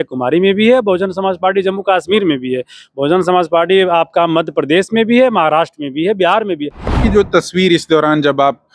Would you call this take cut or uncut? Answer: cut